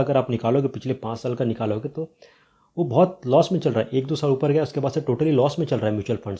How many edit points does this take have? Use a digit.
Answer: 0